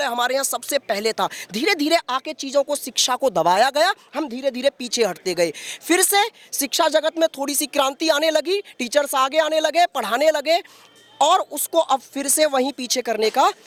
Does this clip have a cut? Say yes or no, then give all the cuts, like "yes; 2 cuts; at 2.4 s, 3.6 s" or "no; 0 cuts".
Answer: no; 0 cuts